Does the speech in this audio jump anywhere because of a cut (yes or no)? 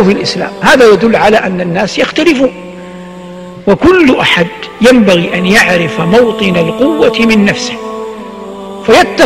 no